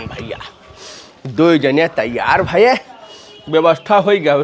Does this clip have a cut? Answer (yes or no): no